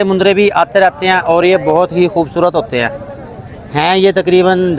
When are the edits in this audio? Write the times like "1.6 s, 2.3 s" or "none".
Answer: none